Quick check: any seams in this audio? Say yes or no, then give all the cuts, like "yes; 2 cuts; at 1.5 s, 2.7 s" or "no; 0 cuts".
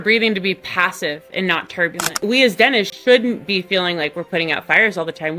yes; 1 cut; at 2.1 s